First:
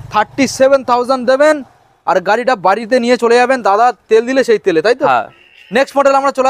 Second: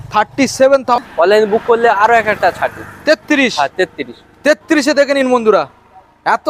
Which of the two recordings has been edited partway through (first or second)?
second